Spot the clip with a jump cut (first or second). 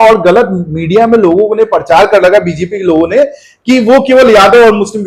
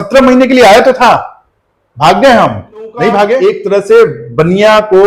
second